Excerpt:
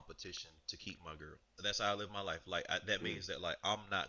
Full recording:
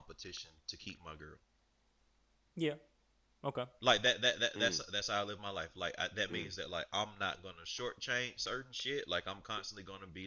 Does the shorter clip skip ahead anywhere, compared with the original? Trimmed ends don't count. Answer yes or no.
yes